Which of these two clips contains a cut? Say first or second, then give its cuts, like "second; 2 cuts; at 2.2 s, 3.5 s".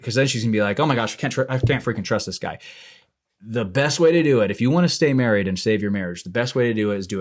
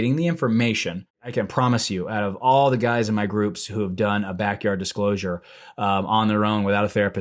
second; 1 cut; at 1.3 s